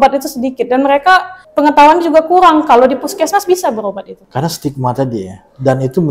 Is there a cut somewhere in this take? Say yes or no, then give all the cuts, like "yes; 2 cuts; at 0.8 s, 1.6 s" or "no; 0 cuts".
yes; 2 cuts; at 1.4 s, 4.1 s